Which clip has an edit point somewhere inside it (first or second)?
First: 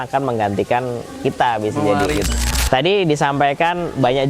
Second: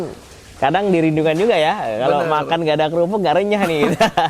first